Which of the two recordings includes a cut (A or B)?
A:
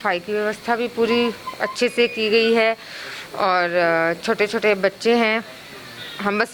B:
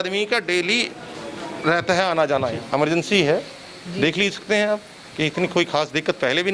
B